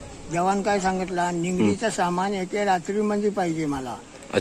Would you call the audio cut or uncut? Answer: uncut